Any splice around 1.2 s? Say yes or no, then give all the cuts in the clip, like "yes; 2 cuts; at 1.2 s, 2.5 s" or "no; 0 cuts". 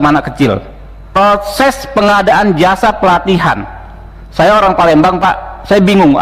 yes; 1 cut; at 1.2 s